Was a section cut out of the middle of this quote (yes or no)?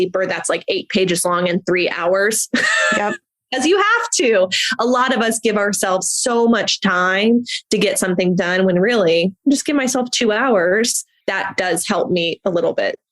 no